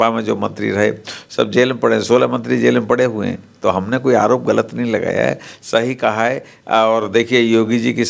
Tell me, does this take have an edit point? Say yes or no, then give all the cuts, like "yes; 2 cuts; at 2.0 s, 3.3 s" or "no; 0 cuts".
no; 0 cuts